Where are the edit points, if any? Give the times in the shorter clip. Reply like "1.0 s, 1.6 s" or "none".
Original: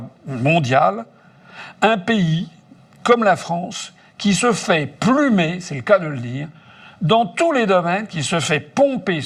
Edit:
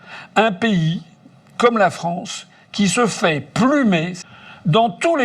4.2 s